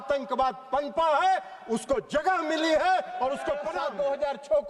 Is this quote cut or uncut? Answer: cut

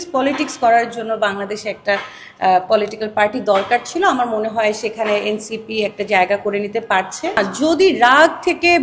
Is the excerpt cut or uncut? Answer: cut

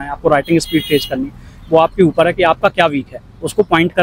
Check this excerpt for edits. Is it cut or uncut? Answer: uncut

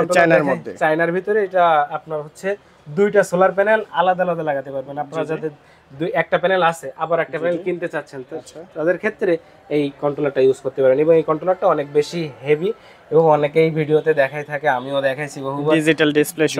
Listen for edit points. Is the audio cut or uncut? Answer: uncut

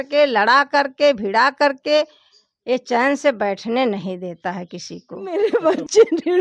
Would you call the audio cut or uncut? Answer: cut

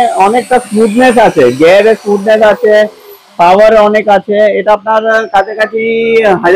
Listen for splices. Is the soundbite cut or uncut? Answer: uncut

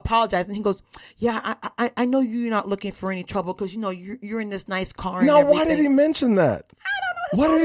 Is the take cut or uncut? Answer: uncut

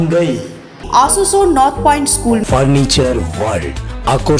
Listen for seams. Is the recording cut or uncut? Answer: uncut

